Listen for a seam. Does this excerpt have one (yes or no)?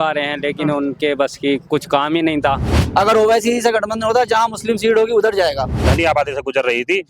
yes